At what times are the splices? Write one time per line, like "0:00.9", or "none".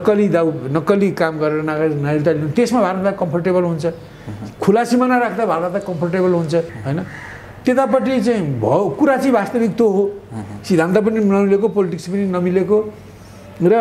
0:06.8